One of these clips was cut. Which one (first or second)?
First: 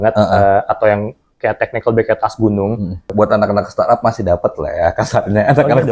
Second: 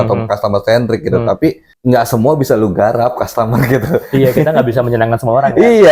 first